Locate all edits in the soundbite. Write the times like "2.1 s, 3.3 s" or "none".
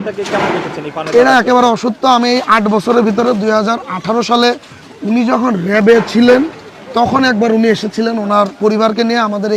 none

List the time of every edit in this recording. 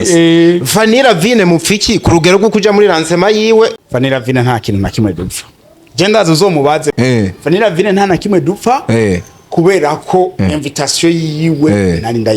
3.7 s, 6.9 s

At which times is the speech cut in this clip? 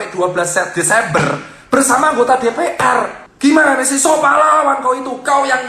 3.2 s

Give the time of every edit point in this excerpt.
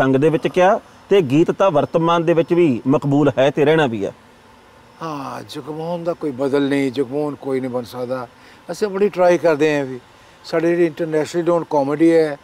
none

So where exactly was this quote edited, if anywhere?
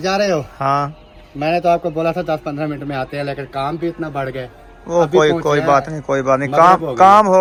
none

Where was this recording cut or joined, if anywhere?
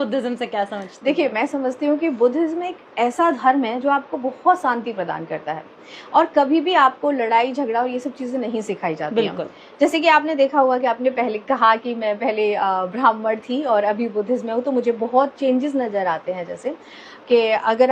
none

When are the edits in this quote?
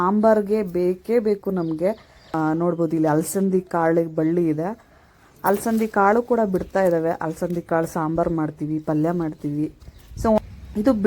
2.3 s, 10.4 s

